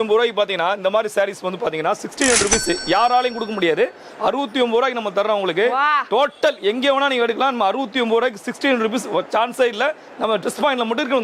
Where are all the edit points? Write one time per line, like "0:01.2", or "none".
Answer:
none